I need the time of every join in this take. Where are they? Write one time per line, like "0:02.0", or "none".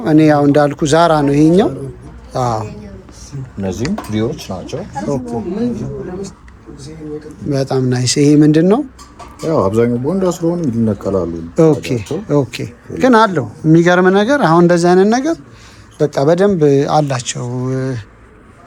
none